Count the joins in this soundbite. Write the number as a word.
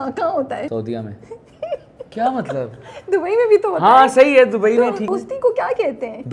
three